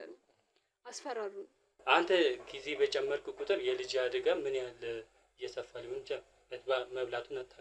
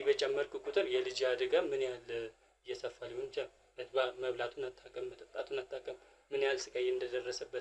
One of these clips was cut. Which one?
first; 1 cut; at 1.6 s

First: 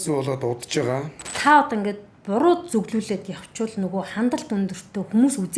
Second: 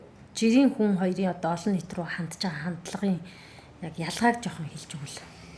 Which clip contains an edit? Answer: first; 1 cut; at 1.3 s

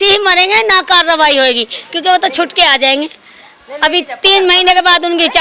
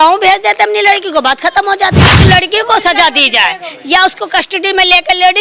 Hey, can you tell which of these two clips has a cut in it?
second; 1 cut; at 2.1 s

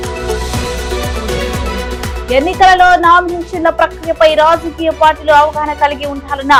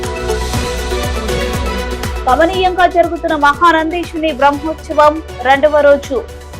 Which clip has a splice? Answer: second; 1 cut; at 2.2 s

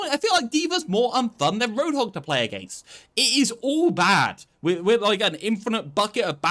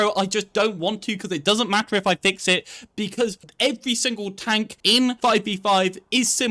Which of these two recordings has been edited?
second; 2 cuts; at 3.4 s, 5.0 s

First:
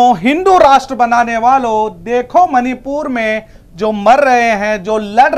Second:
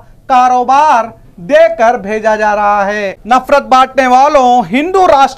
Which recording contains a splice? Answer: second; 1 cut; at 3.2 s

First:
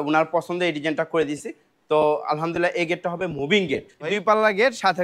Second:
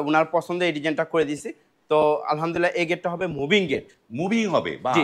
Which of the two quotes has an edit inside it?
first; 1 cut; at 4.1 s

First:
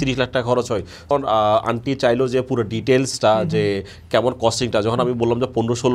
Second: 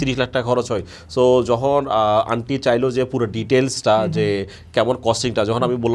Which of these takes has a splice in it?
first; 1 cut; at 1.1 s

